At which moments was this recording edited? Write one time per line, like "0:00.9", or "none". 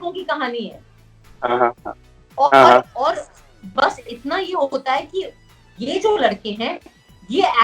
none